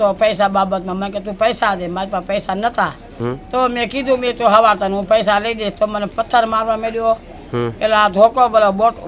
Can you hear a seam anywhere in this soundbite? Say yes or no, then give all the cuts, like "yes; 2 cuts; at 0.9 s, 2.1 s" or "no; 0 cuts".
no; 0 cuts